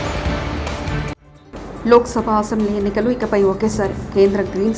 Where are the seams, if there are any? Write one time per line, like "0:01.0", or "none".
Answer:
0:01.3

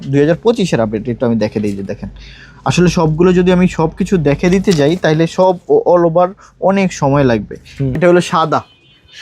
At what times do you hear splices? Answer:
0:07.9

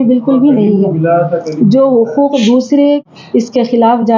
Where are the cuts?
0:03.0

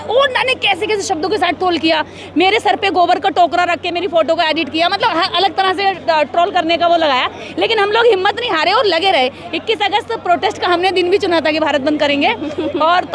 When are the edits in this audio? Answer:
none

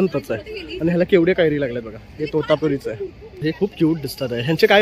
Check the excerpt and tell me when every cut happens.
0:03.4

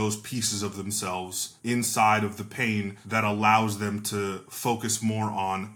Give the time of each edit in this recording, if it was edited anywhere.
0:01.4
0:03.0

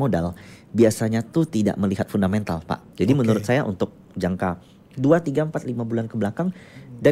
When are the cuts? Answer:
0:02.8

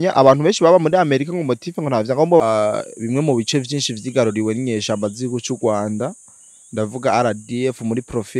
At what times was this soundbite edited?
0:02.4

